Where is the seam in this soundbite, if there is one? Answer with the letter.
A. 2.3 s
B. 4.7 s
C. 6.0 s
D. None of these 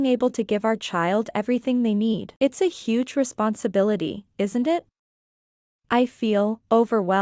A